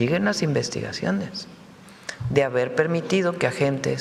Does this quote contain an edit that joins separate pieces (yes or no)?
no